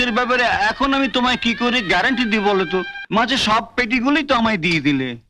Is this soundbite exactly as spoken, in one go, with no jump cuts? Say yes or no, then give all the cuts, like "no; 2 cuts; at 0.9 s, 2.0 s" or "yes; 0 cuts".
no; 1 cut; at 3.0 s